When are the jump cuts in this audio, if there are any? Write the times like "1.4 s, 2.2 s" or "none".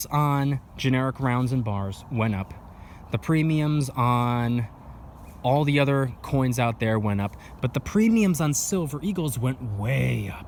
none